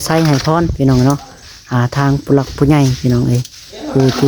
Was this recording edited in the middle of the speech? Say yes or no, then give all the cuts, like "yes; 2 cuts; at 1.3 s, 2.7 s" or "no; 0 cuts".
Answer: no; 0 cuts